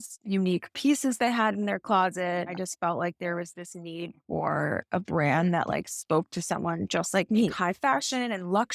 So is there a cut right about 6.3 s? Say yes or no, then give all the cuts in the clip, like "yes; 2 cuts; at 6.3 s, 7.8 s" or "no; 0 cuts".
no; 3 cuts; at 2.6 s, 4.8 s, 7.5 s